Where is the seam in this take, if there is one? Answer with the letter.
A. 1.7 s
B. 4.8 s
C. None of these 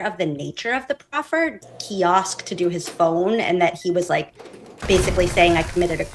A